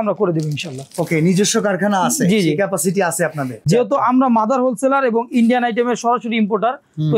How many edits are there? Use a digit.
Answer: 1